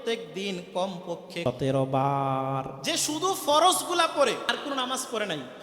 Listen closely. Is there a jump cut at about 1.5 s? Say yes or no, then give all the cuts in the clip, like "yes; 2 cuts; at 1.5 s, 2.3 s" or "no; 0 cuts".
yes; 3 cuts; at 1.5 s, 2.7 s, 4.5 s